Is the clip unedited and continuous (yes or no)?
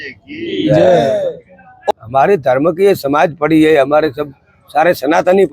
no